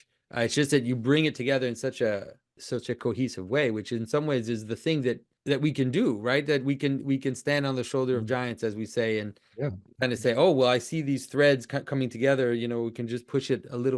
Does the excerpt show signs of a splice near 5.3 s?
yes; 2 cuts; at 2.6 s, 5.3 s

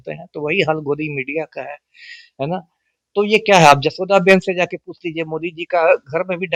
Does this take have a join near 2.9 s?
no; 0 cuts

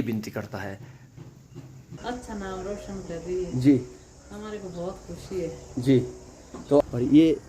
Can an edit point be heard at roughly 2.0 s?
yes; 2 cuts; at 2.0 s, 6.8 s

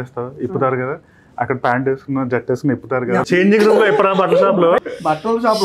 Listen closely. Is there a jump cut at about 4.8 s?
yes; 2 cuts; at 3.2 s, 4.8 s

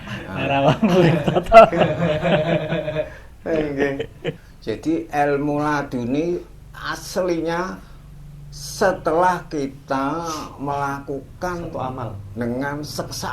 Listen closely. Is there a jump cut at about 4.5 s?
yes; 1 cut; at 4.5 s

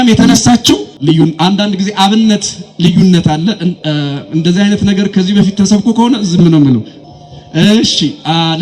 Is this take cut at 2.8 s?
no; 2 cuts; at 0.9 s, 7.0 s

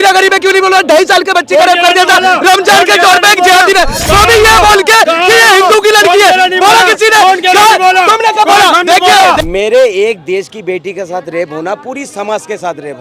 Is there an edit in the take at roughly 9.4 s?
yes; 1 cut; at 9.4 s

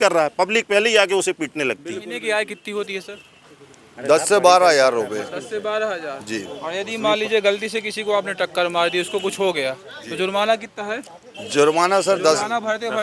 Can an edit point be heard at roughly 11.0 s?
no; 1 cut; at 2.1 s

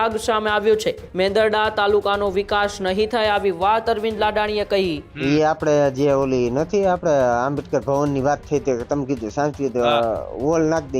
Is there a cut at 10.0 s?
no; 2 cuts; at 1.0 s, 5.1 s

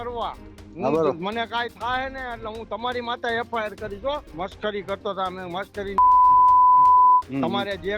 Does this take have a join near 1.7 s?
no; 1 cut; at 4.3 s

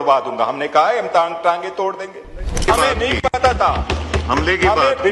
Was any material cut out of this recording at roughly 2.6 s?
yes; 1 cut; at 2.6 s

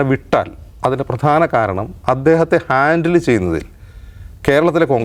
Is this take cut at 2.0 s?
no; 0 cuts

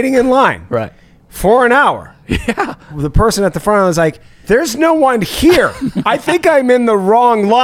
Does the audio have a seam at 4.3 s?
yes; 2 cuts; at 2.9 s, 4.3 s

